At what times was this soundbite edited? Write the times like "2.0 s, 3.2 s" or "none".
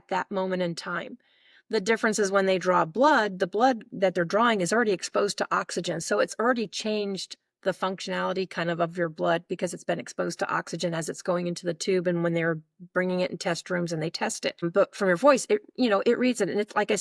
14.6 s